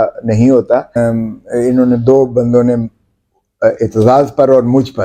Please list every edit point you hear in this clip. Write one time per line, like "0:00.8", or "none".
0:01.0